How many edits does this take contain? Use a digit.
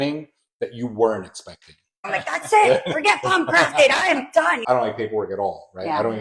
2